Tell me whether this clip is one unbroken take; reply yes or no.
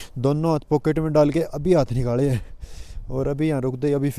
yes